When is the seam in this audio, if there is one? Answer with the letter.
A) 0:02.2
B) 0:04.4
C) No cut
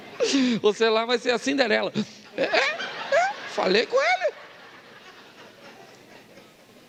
C